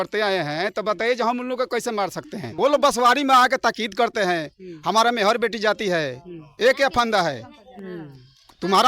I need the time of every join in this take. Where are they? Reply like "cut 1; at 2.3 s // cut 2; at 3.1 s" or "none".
cut 1; at 2.5 s